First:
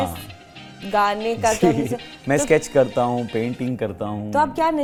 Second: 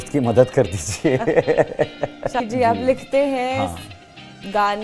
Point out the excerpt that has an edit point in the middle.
second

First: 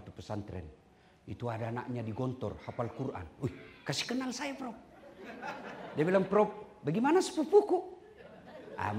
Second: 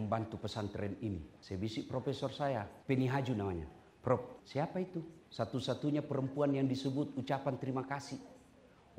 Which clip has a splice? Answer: second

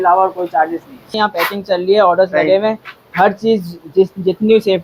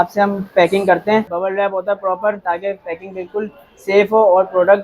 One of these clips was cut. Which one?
second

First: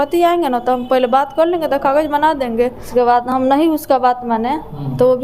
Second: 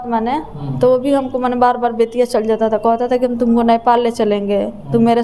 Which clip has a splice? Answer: first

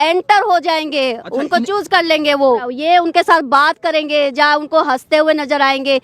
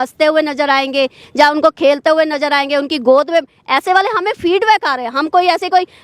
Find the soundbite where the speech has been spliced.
first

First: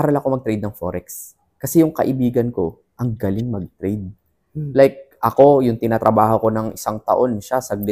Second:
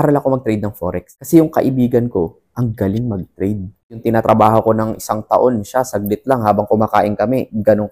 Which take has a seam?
second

